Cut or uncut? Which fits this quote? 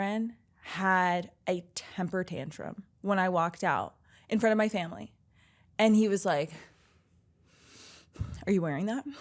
uncut